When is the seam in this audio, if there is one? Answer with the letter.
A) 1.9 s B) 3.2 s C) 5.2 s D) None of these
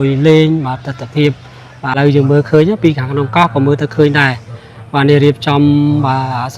A